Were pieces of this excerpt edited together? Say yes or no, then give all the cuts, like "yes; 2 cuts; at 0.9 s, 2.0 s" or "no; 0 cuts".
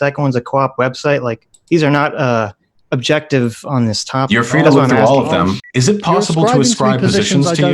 yes; 1 cut; at 5.6 s